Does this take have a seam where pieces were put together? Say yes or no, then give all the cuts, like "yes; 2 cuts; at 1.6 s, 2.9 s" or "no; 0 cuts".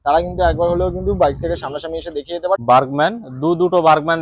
yes; 1 cut; at 2.6 s